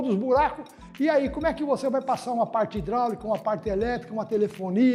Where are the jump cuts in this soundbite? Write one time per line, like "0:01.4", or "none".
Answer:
none